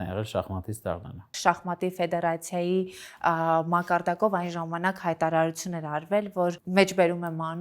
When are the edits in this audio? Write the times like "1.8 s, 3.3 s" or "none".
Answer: 1.3 s, 6.6 s